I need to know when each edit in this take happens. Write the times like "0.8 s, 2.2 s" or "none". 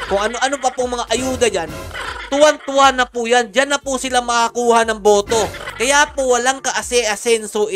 none